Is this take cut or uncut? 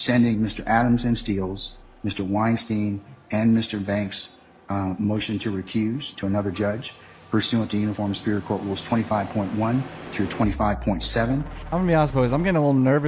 cut